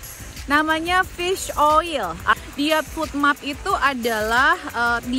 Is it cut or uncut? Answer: cut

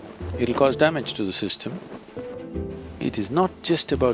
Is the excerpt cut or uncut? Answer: cut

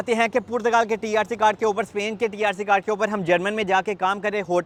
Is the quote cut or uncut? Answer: uncut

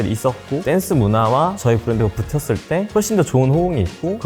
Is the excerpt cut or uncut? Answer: uncut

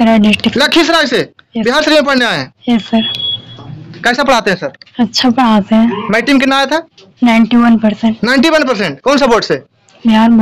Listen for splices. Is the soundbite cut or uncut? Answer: uncut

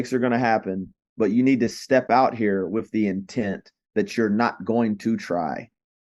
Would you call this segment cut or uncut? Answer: uncut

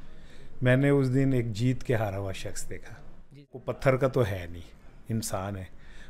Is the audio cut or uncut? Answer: cut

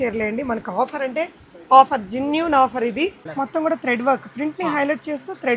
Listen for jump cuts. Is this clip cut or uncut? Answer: cut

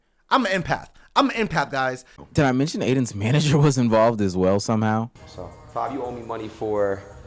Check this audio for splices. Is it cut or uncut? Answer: cut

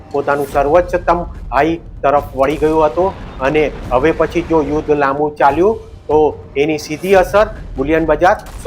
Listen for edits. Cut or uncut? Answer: uncut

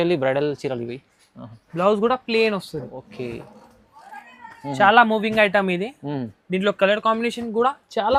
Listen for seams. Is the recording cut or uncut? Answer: uncut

